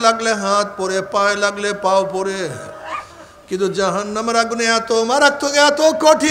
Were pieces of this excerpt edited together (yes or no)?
no